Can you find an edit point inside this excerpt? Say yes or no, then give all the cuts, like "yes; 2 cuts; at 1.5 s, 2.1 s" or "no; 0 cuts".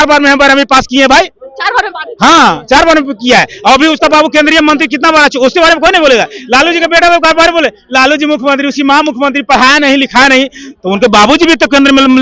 no; 0 cuts